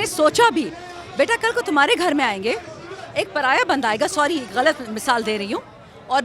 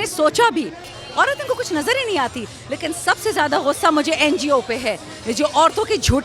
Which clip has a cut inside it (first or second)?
second